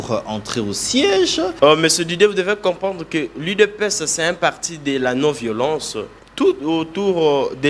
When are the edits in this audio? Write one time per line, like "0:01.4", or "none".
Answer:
0:01.5
0:06.4